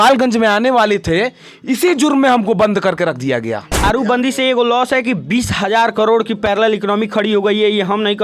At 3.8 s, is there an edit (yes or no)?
yes